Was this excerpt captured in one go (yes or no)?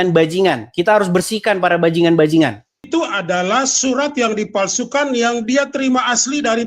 no